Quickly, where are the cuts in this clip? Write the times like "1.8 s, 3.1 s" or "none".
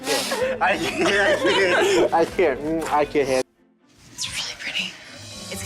3.5 s